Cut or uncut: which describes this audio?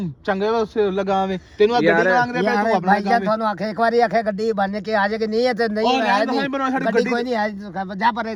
uncut